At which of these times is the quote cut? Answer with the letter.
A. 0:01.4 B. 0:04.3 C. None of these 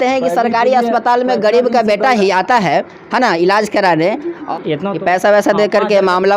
B